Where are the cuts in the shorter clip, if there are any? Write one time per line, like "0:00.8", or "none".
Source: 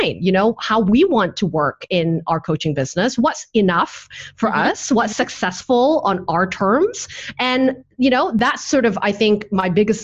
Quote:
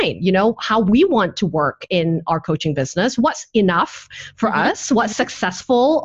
none